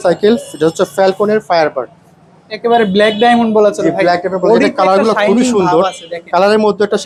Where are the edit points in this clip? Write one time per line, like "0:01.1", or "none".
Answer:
none